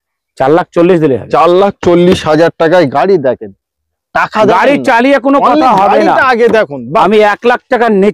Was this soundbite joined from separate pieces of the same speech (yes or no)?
yes